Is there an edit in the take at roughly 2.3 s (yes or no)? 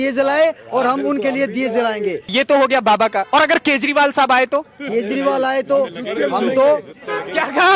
yes